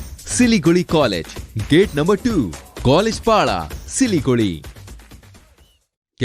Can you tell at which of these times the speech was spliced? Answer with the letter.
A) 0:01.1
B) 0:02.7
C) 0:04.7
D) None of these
D